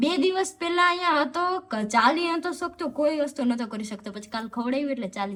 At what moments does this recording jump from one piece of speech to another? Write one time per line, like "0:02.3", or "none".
none